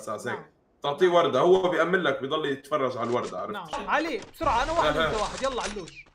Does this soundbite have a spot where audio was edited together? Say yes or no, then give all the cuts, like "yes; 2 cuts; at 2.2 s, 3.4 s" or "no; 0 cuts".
yes; 1 cut; at 3.7 s